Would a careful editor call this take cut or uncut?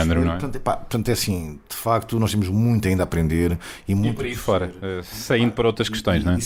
uncut